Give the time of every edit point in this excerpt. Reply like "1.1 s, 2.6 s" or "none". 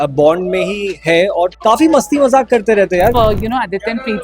1.5 s, 3.1 s